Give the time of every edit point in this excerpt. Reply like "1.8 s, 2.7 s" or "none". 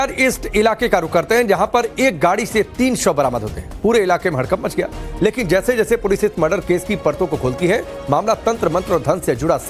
none